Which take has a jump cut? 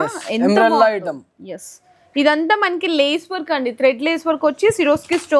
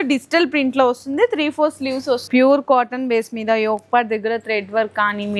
second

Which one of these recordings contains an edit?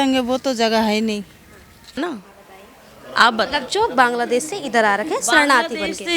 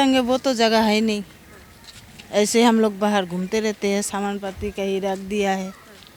first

